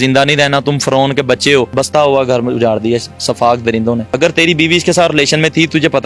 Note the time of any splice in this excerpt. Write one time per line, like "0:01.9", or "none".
0:01.7
0:04.1